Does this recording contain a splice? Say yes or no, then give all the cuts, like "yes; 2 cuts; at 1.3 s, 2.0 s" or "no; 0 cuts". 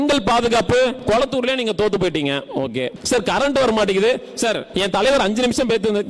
yes; 3 cuts; at 1.0 s, 3.0 s, 4.7 s